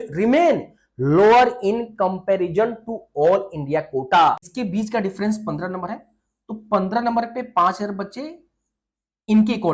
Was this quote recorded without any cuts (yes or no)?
no